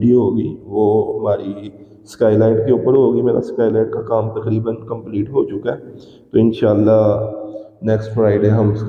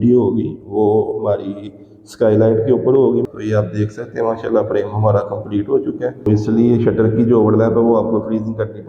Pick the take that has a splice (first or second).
second